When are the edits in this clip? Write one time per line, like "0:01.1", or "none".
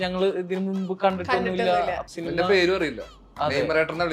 0:02.1